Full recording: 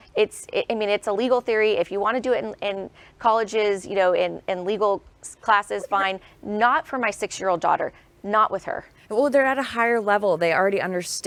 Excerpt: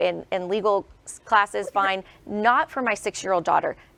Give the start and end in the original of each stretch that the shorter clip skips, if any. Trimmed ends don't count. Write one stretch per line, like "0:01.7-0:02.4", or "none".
none